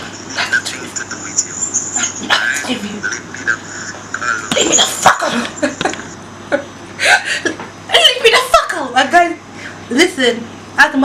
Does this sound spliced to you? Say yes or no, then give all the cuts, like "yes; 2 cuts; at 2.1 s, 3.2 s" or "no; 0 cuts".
no; 0 cuts